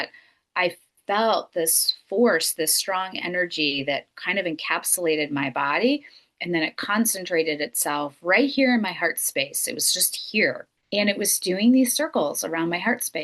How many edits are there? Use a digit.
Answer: 1